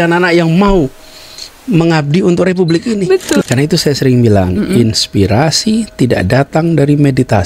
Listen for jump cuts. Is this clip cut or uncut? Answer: cut